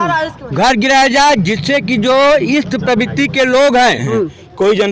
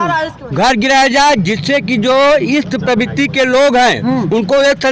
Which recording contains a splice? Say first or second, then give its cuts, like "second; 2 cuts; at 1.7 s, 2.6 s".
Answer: first; 1 cut; at 4.0 s